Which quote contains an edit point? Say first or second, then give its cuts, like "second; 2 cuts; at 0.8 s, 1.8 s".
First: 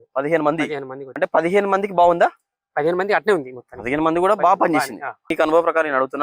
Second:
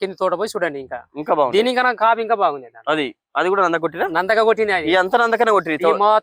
first; 2 cuts; at 1.0 s, 5.3 s